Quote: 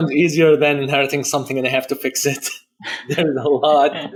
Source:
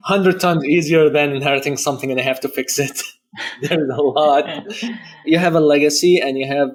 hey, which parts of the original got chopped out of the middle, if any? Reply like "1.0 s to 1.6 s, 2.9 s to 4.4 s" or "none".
none